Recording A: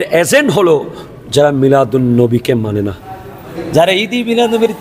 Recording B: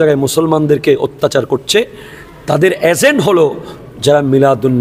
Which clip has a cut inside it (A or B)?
A